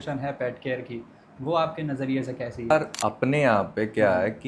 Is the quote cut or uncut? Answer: cut